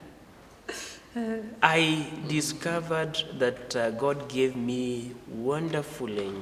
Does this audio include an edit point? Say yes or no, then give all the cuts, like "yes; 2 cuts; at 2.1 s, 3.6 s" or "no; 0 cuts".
no; 0 cuts